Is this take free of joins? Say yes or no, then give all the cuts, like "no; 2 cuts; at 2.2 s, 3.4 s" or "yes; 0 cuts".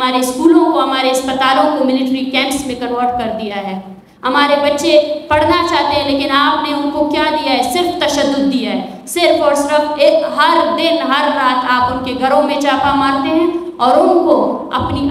yes; 0 cuts